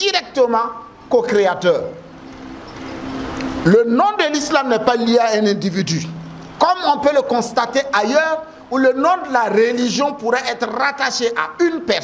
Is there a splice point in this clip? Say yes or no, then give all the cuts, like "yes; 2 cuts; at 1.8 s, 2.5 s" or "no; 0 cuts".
no; 0 cuts